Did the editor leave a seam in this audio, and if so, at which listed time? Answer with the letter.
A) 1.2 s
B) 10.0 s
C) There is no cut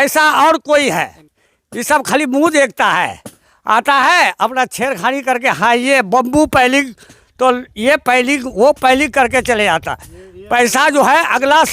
A